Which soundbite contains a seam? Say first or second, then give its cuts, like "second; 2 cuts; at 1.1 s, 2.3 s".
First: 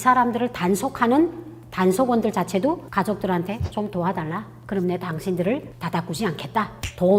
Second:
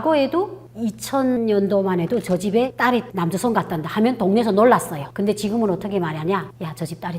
second; 2 cuts; at 1.4 s, 5.0 s